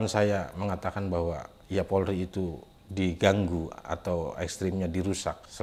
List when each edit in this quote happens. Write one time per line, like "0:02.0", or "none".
none